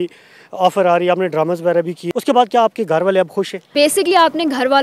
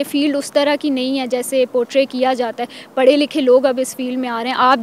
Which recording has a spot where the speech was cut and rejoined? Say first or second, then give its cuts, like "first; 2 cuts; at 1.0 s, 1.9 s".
first; 2 cuts; at 2.0 s, 3.6 s